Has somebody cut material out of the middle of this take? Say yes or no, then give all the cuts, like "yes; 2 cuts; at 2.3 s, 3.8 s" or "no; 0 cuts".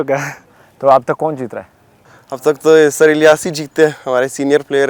no; 0 cuts